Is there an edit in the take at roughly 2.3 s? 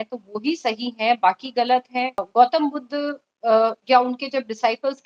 yes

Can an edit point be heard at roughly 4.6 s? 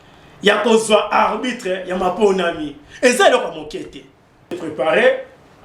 yes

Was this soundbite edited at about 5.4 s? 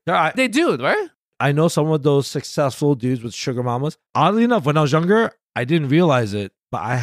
no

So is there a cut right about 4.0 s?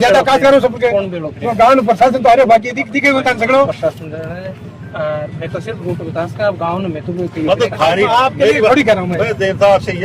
no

